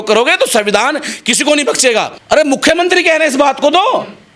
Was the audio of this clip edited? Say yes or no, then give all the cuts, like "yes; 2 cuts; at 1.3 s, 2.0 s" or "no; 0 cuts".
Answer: yes; 1 cut; at 2.2 s